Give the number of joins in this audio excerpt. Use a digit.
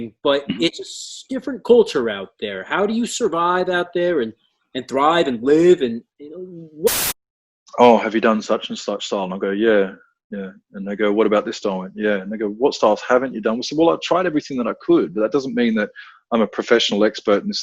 1